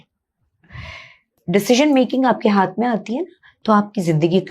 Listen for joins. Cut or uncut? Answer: cut